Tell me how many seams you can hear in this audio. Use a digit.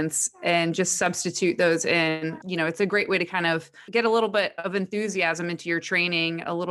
2